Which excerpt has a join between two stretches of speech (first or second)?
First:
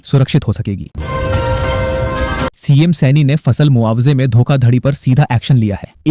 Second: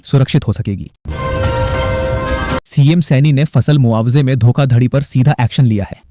second